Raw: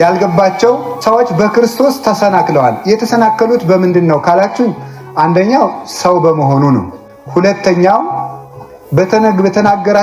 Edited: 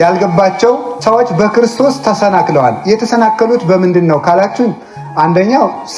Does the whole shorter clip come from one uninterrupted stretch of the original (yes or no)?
yes